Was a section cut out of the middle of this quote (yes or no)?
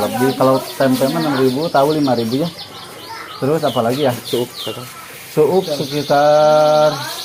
no